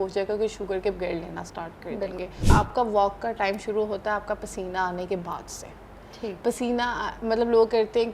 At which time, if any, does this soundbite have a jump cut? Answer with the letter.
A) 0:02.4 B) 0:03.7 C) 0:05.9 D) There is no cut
A